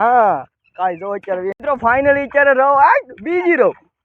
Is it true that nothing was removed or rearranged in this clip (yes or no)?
no